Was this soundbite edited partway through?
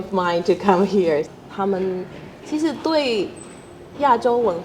yes; 1 cut; at 1.3 s

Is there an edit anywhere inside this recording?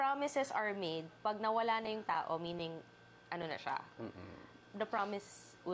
no; 0 cuts

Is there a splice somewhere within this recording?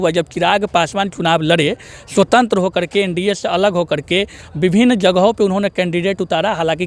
no; 0 cuts

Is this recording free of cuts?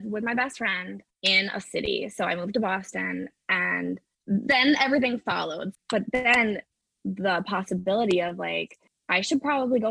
no; 1 cut; at 5.7 s

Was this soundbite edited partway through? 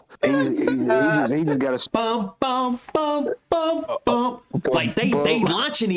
yes; 1 cut; at 1.8 s

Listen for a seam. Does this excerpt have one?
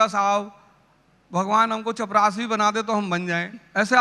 no; 0 cuts

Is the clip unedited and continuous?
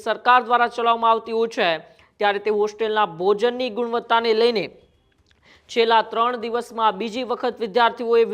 yes; 0 cuts

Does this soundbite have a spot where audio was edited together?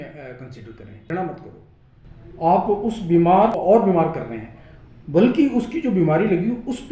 yes; 2 cuts; at 1.0 s, 3.6 s

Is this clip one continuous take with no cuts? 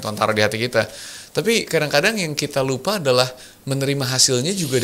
yes; 0 cuts

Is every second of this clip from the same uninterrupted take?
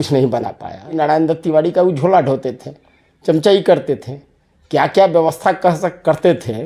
no; 1 cut; at 0.9 s

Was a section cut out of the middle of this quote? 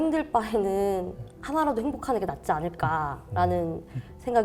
no; 0 cuts

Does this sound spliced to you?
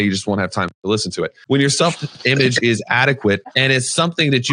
yes; 2 cuts; at 1.4 s, 3.5 s

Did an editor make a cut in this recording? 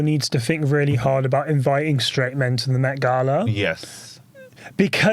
no; 0 cuts

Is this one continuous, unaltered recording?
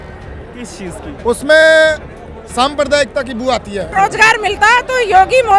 no; 1 cut; at 3.9 s

